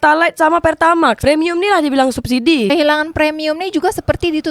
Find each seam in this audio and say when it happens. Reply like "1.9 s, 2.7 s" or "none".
2.7 s